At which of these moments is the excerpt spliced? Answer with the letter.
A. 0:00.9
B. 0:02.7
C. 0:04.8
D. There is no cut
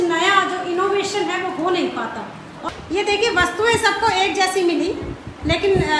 B